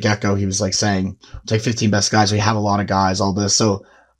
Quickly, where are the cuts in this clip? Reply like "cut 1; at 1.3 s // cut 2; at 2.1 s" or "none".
none